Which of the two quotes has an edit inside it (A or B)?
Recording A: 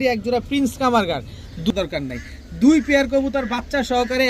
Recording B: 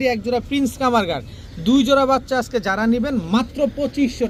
A